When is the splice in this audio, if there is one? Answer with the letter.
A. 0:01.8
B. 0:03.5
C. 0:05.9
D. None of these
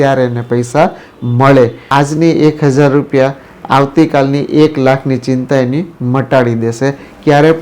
A